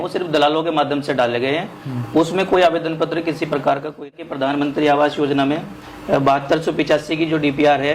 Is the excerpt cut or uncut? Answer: cut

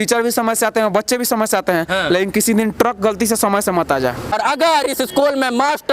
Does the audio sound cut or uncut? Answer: cut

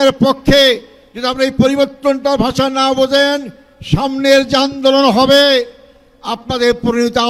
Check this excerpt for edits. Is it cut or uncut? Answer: uncut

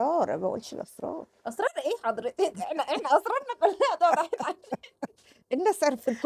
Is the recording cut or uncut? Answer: uncut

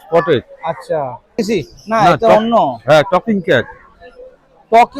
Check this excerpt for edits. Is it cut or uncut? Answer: cut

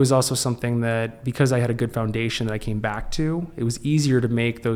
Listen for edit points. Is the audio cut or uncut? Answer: uncut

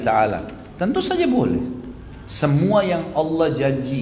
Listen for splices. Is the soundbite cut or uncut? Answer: uncut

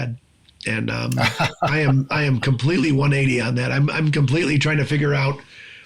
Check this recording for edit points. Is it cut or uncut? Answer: uncut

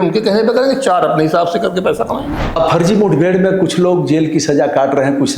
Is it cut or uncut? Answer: cut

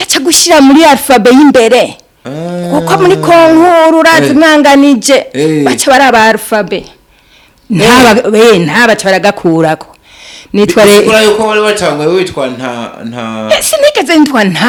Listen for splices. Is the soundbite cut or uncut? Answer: uncut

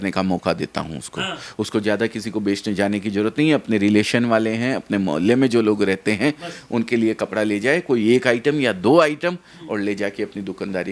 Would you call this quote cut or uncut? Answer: uncut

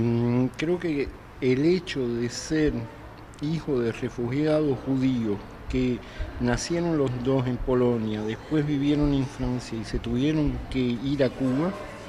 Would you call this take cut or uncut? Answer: cut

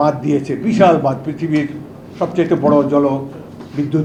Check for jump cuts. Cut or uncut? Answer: uncut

